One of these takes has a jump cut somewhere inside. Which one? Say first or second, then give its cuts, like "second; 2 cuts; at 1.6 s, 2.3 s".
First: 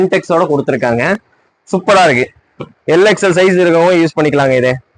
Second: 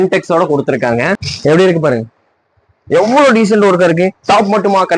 second; 1 cut; at 1.3 s